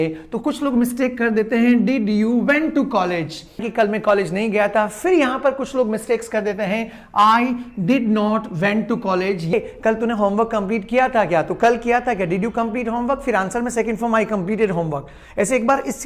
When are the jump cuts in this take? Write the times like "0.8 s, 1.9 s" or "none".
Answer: 3.6 s, 9.5 s